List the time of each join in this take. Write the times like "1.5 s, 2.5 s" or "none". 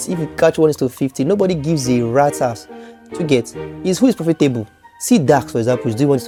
none